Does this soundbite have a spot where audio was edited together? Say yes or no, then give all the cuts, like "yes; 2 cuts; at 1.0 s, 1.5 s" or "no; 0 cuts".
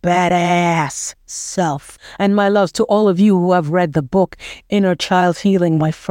yes; 1 cut; at 2.0 s